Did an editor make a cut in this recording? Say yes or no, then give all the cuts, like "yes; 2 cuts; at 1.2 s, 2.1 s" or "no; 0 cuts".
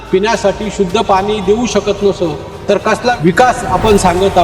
yes; 1 cut; at 3.2 s